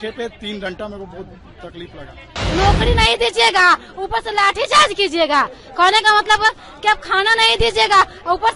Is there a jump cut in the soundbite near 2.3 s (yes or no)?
yes